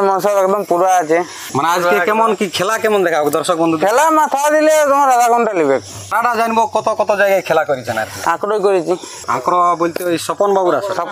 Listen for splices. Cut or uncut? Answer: cut